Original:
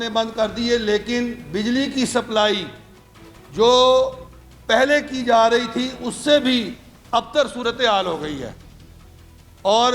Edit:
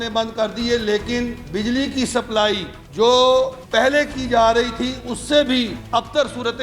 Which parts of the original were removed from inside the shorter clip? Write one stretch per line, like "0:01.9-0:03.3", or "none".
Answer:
0:02.8-0:03.4
0:04.2-0:04.6
0:06.7-0:07.0